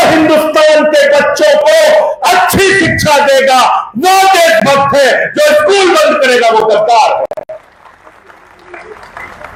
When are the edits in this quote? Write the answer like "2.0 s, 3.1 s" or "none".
none